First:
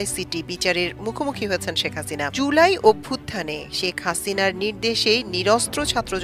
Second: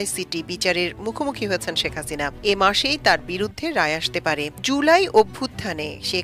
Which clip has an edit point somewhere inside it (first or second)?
first